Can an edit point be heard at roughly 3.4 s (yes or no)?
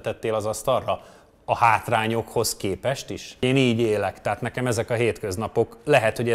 yes